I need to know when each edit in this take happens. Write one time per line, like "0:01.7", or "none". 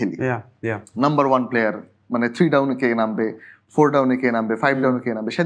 none